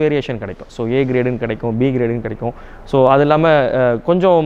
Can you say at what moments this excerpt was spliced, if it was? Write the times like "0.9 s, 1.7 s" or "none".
none